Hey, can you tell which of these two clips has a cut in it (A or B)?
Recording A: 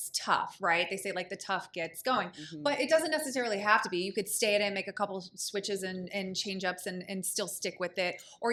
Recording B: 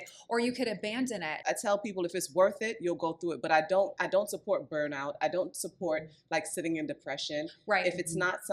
B